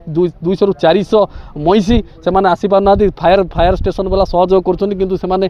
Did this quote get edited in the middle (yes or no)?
no